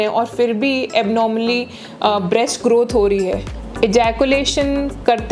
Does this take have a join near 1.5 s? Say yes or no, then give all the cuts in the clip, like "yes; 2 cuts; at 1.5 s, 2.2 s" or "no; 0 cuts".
no; 1 cut; at 3.6 s